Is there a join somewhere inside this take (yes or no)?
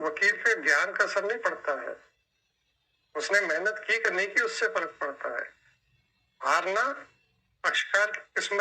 no